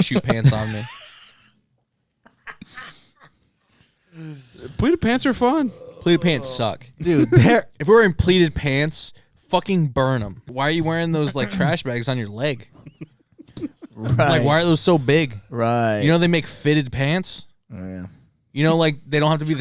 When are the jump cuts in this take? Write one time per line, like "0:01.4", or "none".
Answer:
0:10.4